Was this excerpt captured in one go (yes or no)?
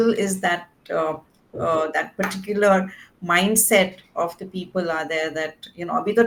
yes